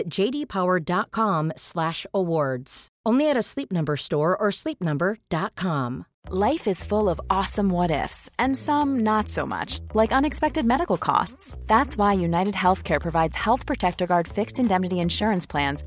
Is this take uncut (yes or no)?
no